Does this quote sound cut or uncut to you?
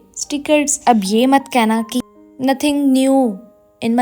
cut